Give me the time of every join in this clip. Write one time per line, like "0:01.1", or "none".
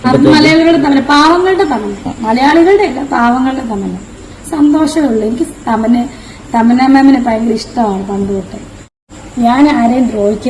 0:08.8